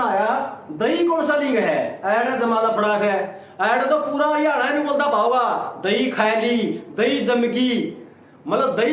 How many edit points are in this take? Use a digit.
0